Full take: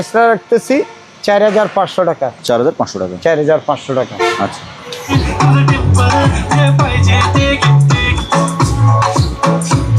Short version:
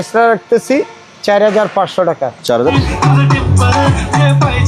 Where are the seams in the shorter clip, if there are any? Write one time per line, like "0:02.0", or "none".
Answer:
0:02.7